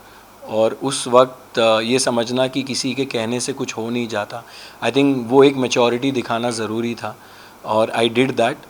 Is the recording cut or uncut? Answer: uncut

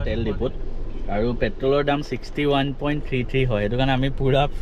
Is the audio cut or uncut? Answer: uncut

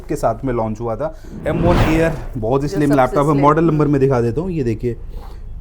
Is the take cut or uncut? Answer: cut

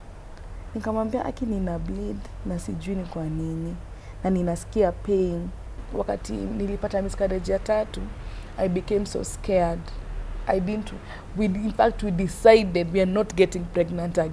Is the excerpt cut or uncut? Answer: cut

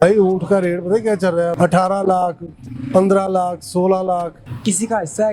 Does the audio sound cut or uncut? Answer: cut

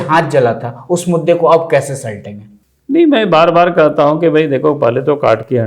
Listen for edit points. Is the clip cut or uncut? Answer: uncut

